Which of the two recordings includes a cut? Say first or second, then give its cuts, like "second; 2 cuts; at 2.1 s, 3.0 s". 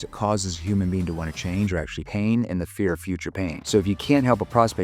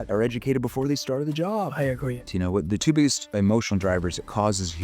second; 2 cuts; at 2.2 s, 3.2 s